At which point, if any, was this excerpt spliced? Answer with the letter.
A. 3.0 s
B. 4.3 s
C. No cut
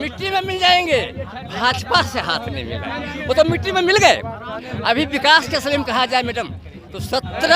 C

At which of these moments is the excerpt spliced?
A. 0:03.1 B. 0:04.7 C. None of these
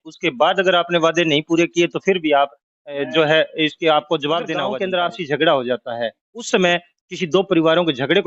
B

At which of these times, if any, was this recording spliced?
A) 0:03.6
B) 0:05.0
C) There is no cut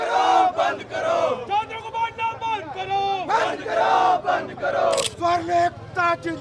B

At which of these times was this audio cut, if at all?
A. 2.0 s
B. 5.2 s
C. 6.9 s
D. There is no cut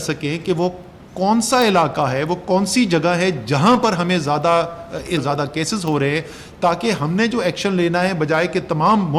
B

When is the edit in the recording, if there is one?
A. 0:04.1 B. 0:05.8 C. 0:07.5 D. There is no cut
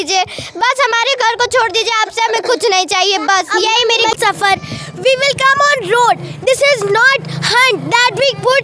A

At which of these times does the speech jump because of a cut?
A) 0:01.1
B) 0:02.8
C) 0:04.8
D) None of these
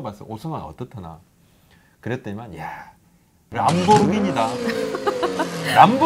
D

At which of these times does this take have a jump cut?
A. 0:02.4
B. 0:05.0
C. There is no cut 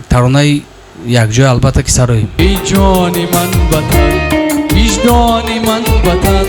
A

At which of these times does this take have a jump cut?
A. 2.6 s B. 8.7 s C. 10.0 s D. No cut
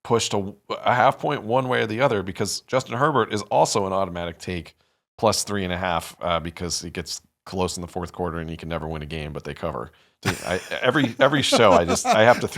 C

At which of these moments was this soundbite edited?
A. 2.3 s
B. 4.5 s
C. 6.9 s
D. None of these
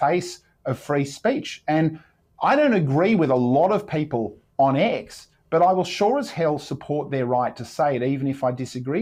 D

